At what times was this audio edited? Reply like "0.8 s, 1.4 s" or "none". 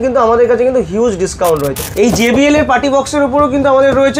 1.8 s